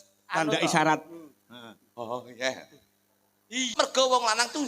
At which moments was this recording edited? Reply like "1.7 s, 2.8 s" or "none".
3.7 s